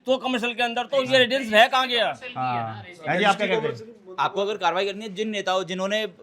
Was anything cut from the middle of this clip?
no; 0 cuts

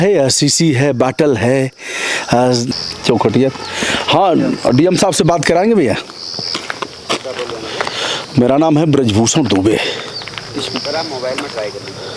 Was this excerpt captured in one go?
no; 1 cut; at 2.8 s

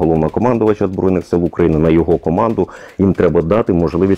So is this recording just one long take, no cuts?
yes; 0 cuts

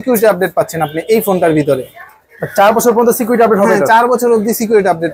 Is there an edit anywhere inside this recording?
no; 0 cuts

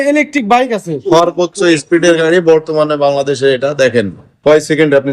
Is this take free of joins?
no; 1 cut; at 0.9 s

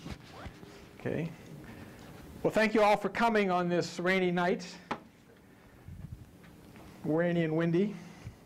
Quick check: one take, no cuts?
yes; 0 cuts

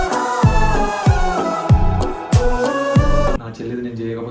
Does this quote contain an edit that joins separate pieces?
yes; 1 cut; at 3.4 s

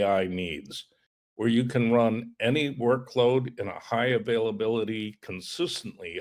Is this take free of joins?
yes; 0 cuts

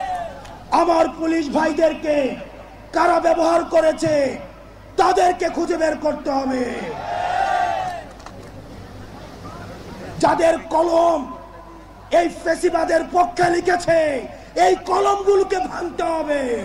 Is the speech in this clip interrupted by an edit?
no; 0 cuts

